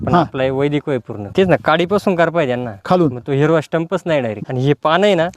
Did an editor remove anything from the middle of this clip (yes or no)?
yes